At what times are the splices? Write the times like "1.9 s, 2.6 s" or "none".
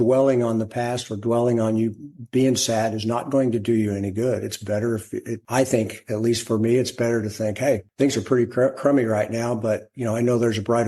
5.4 s, 7.9 s